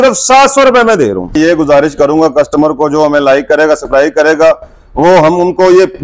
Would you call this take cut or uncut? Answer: cut